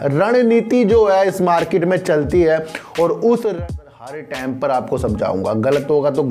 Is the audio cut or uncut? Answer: cut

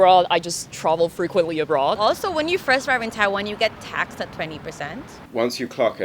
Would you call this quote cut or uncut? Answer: cut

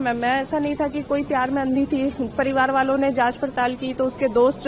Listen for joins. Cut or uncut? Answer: uncut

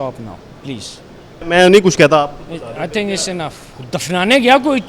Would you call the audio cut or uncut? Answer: cut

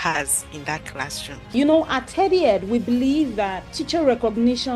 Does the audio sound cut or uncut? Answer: cut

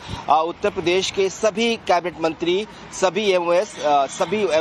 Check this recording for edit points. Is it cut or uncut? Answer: uncut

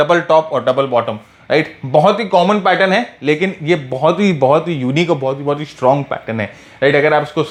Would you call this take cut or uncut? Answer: uncut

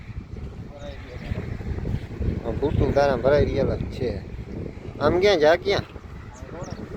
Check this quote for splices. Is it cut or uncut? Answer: uncut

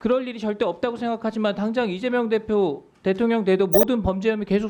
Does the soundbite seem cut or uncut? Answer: uncut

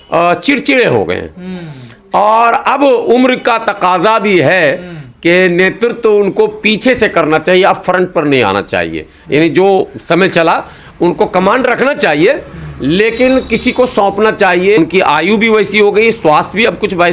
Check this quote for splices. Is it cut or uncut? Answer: uncut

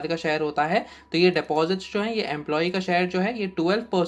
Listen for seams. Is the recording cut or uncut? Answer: uncut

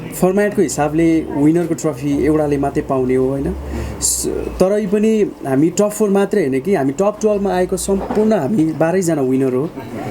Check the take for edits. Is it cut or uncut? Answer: uncut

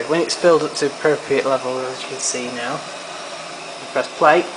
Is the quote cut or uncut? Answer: cut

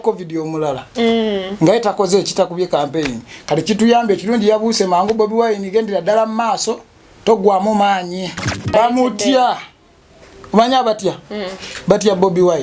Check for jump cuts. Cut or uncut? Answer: cut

